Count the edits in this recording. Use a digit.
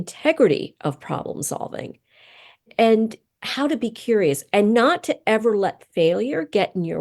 1